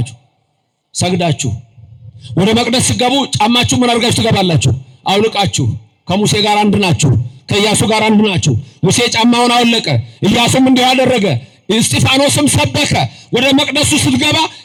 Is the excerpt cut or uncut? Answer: uncut